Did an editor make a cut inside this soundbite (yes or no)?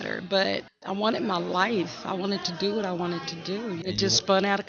yes